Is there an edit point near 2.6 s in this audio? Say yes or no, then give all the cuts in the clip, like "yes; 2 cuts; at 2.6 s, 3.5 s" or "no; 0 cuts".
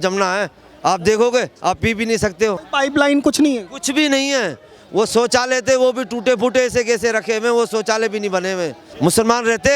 yes; 2 cuts; at 2.6 s, 8.8 s